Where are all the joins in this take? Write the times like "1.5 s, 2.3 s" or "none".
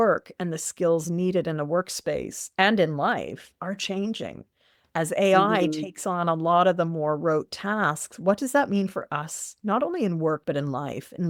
none